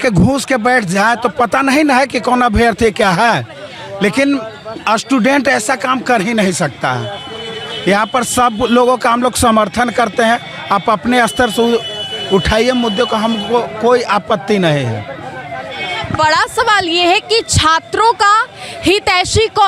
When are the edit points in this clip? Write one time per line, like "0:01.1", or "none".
none